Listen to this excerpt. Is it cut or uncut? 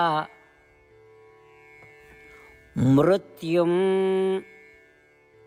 uncut